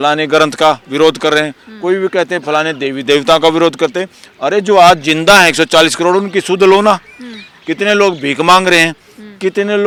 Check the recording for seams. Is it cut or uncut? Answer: uncut